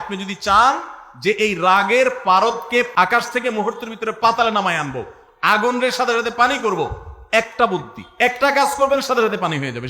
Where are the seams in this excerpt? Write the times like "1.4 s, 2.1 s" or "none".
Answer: 2.9 s